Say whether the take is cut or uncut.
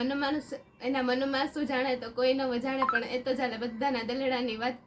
uncut